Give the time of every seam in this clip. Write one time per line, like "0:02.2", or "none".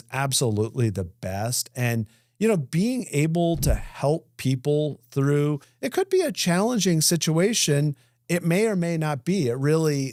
none